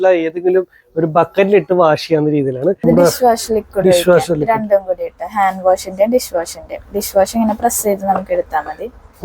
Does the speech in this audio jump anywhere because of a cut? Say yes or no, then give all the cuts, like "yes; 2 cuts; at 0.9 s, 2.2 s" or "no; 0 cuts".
yes; 1 cut; at 2.8 s